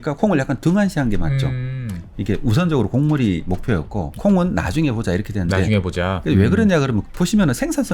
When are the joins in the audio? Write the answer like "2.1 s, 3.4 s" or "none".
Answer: 4.1 s, 7.0 s